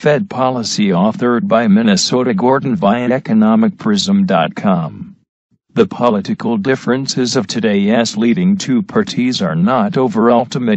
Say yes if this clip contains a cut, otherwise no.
no